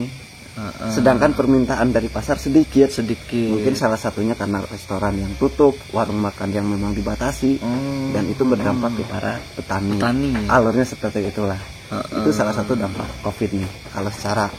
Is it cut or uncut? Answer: uncut